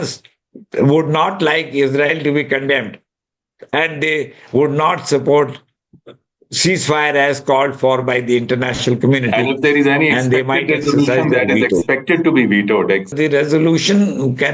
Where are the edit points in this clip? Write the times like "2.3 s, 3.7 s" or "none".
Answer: 13.1 s